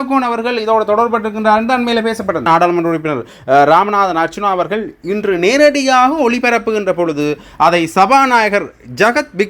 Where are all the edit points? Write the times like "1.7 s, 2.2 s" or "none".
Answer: 2.4 s